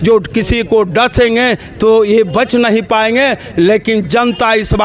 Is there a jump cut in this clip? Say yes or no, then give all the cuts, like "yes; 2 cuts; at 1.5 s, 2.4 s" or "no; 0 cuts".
no; 0 cuts